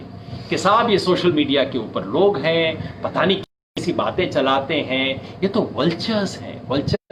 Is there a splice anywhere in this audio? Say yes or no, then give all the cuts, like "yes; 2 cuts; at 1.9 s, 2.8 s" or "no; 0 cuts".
no; 0 cuts